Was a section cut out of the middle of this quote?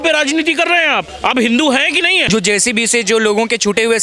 yes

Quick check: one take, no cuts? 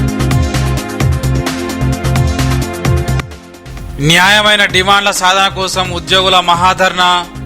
no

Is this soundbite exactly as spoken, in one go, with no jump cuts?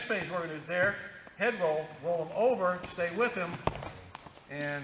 yes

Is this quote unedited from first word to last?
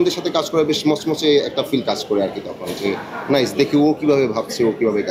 yes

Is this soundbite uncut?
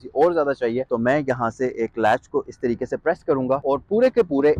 no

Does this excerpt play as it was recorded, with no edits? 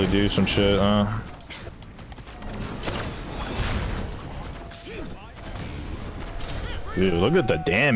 no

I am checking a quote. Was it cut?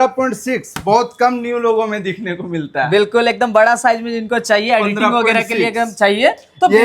no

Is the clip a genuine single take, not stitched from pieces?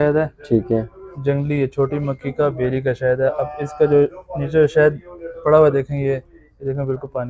yes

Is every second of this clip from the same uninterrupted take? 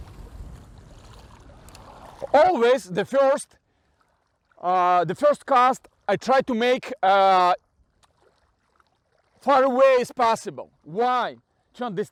yes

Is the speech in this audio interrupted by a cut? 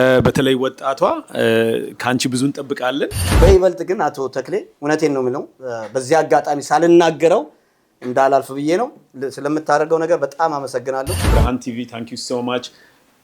yes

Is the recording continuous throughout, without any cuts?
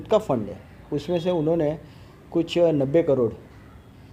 yes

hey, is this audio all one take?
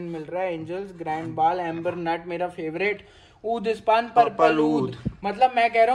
yes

